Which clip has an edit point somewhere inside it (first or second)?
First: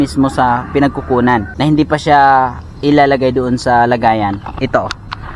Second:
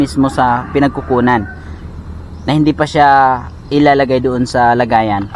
first